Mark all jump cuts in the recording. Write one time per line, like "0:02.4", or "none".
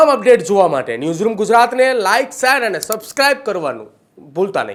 none